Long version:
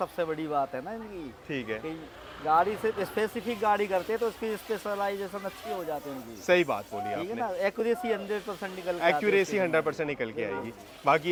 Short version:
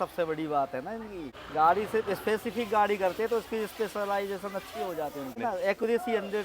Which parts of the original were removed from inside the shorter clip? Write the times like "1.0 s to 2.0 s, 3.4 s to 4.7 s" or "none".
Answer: 1.3 s to 2.2 s, 6.2 s to 7.3 s